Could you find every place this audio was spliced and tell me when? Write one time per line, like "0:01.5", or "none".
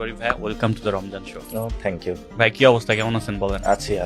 0:01.4
0:02.3